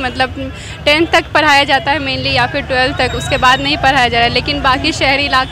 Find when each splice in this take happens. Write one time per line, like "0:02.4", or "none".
none